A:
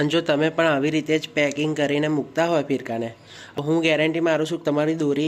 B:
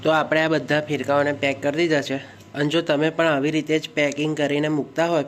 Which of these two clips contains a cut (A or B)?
A